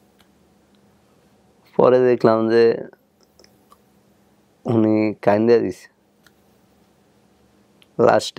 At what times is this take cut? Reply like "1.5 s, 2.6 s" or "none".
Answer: none